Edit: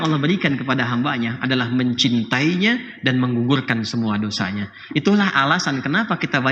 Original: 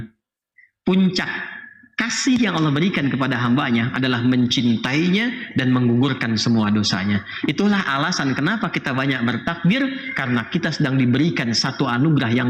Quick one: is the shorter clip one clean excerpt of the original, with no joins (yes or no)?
yes